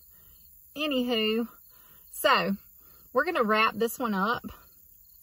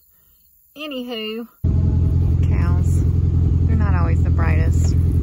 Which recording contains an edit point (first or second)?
second